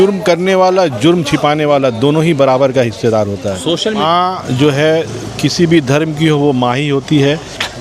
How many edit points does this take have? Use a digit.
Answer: 1